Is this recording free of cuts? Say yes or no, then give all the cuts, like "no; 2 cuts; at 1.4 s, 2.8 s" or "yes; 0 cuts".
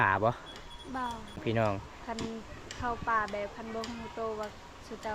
no; 1 cut; at 1.4 s